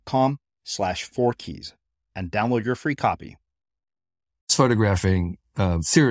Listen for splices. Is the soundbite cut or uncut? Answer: cut